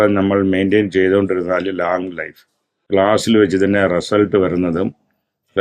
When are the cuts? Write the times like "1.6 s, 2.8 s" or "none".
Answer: 2.9 s